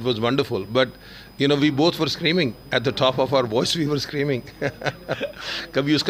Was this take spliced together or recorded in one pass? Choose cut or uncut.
uncut